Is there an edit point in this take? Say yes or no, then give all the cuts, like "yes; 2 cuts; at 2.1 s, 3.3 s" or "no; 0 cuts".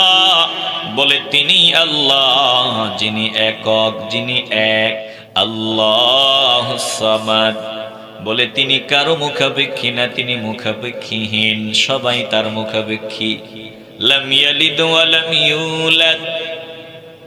yes; 1 cut; at 5.1 s